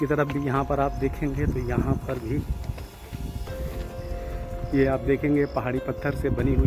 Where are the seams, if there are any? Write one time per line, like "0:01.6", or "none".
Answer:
none